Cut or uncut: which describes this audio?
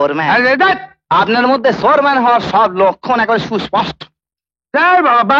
cut